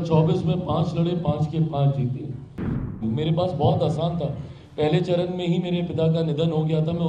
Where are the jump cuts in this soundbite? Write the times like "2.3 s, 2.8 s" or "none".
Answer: 2.9 s